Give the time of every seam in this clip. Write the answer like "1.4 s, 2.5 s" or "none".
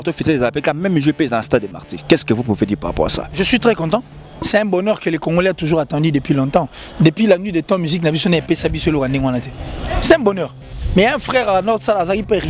10.7 s